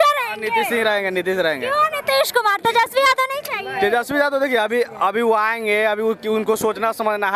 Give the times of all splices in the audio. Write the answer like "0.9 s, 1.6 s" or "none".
none